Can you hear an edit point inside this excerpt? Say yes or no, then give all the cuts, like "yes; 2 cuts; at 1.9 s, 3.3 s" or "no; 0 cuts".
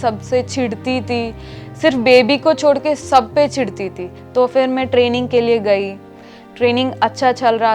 no; 0 cuts